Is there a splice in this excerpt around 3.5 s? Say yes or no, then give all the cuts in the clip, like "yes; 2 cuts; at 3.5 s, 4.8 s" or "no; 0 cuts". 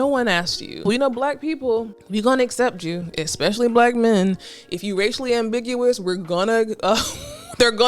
no; 2 cuts; at 0.8 s, 2.0 s